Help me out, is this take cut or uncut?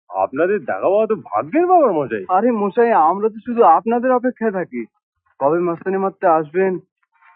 uncut